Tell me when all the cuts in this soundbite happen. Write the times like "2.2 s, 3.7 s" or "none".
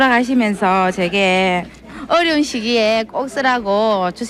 none